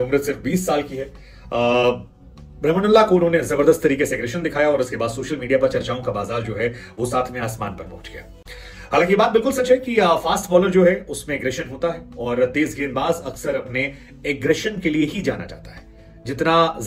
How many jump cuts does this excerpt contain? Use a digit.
0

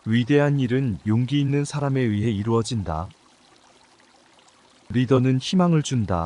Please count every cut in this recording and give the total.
0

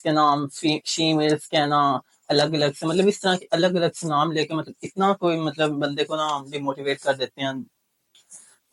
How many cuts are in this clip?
0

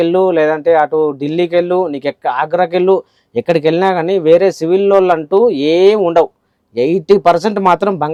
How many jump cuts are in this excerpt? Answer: 0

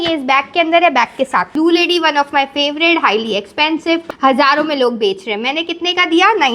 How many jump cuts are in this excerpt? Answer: 2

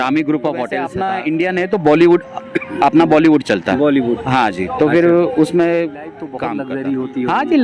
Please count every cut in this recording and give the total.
2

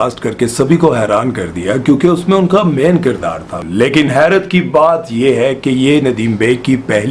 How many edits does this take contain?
1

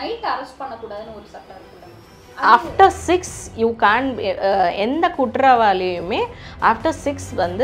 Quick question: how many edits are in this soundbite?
0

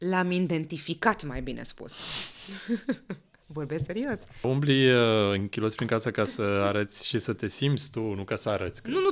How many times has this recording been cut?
1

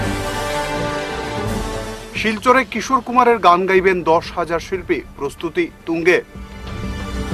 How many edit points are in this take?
1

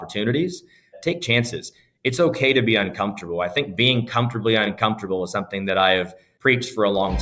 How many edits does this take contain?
2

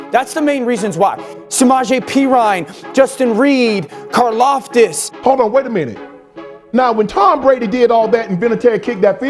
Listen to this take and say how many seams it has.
2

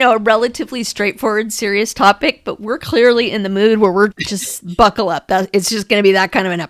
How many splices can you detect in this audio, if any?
1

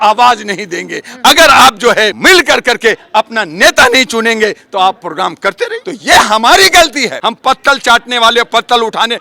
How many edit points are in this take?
3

